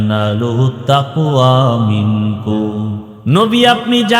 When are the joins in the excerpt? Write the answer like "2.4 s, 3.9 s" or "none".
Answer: 3.1 s